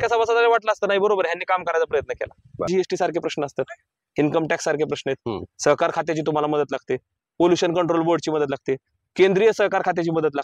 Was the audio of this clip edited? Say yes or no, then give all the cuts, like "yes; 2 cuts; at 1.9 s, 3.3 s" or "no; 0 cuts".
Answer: yes; 1 cut; at 2.7 s